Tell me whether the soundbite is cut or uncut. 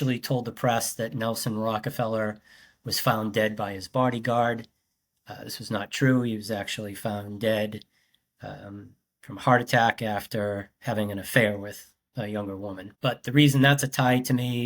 cut